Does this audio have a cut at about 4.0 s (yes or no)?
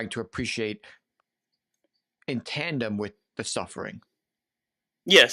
no